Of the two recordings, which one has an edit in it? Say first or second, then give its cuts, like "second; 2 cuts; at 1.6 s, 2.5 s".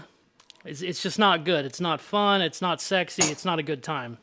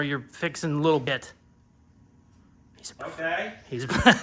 second; 1 cut; at 1.0 s